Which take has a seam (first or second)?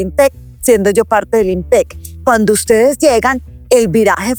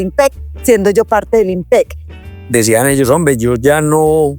second